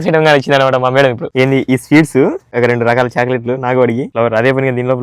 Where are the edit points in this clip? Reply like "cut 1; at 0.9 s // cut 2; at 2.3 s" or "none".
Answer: cut 1; at 1.2 s // cut 2; at 2.4 s // cut 3; at 4.1 s